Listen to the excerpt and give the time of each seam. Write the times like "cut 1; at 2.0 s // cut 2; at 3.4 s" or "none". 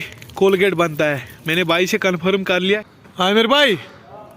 cut 1; at 2.9 s